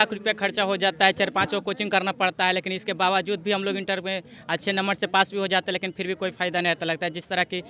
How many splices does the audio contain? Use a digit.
0